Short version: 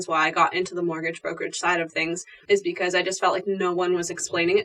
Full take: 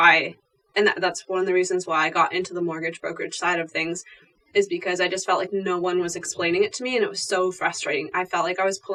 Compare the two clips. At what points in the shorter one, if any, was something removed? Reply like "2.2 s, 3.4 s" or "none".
2.3 s